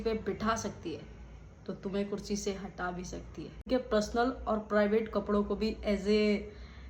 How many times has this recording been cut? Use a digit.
1